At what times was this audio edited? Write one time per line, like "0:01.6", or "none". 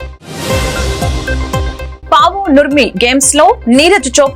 0:01.8